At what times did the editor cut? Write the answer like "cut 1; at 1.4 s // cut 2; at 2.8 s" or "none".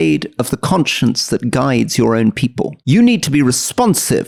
none